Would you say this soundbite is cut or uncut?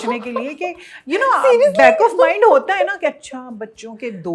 uncut